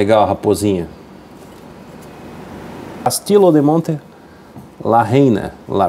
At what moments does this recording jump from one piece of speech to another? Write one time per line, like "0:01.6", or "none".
0:03.1